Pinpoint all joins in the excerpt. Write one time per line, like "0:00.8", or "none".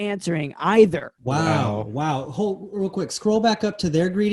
0:01.1